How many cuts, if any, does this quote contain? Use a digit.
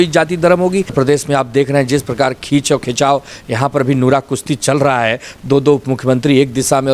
1